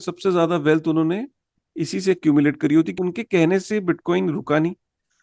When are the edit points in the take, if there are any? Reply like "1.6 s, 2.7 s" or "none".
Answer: 2.9 s